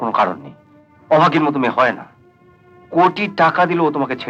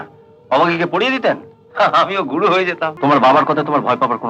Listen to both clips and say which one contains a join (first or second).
second